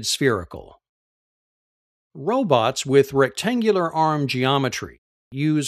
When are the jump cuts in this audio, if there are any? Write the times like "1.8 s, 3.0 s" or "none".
none